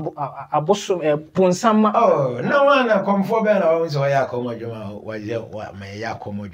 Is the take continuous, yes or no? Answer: yes